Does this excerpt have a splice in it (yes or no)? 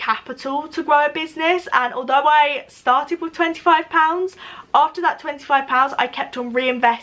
no